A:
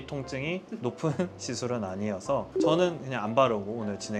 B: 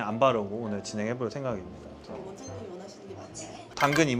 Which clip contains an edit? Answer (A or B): B